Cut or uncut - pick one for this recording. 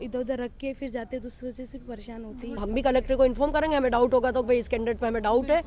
cut